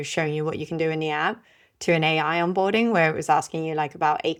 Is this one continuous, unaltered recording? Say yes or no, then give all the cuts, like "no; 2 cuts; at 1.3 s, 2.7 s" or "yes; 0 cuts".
yes; 0 cuts